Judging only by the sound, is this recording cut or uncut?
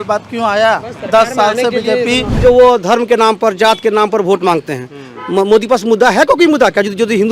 cut